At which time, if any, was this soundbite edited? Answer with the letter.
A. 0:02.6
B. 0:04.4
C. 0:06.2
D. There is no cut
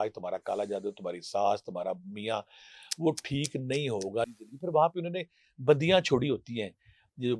B